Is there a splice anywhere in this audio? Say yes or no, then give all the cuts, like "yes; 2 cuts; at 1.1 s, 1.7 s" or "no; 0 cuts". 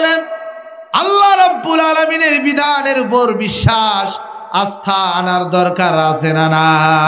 no; 0 cuts